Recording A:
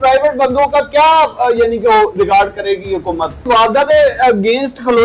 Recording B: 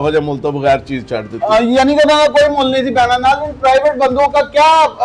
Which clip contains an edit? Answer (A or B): A